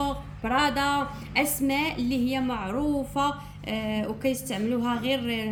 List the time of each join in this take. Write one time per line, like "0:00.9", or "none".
none